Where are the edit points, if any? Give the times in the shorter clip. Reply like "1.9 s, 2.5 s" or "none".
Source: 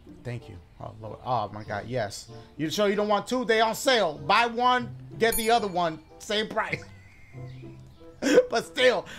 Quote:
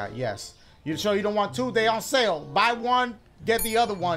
none

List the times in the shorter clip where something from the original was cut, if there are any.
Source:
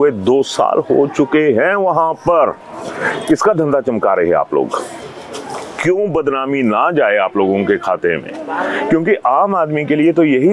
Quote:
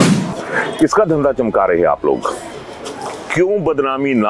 none

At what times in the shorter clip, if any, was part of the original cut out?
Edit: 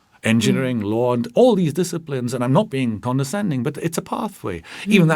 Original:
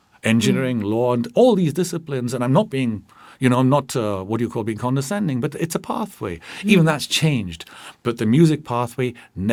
3.0 s

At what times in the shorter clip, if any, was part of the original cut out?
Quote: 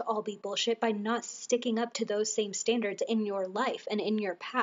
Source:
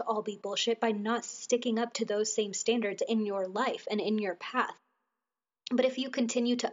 none

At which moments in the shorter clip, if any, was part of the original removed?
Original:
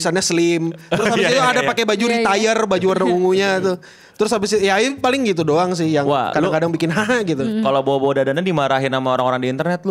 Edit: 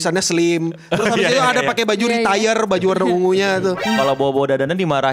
3.8 s

